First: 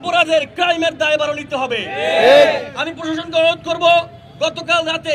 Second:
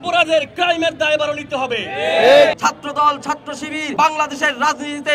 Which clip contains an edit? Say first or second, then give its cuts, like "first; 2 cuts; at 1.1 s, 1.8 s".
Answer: second; 2 cuts; at 2.6 s, 3.8 s